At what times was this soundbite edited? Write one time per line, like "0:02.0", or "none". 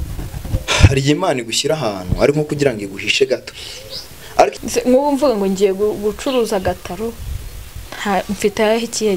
0:04.6